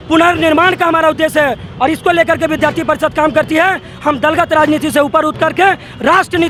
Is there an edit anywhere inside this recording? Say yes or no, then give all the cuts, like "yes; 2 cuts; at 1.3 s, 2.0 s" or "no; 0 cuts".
no; 0 cuts